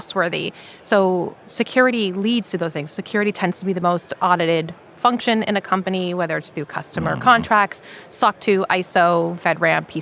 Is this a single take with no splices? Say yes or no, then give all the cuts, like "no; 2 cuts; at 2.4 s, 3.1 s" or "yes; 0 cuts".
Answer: yes; 0 cuts